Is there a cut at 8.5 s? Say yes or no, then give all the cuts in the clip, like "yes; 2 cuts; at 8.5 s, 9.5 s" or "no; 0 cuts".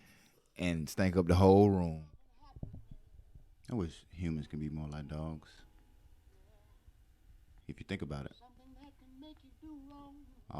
no; 1 cut; at 2.0 s